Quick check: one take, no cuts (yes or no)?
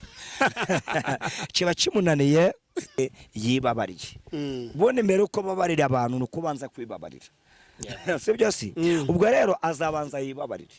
no